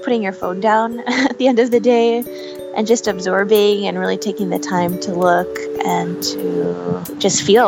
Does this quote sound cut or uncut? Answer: uncut